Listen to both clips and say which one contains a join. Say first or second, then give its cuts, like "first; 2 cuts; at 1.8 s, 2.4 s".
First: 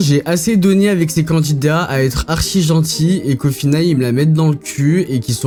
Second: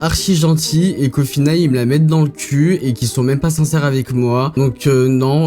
second; 1 cut; at 4.5 s